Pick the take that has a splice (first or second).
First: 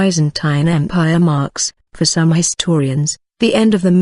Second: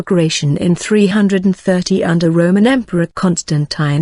first